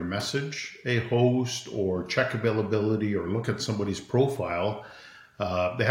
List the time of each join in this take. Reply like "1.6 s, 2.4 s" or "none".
none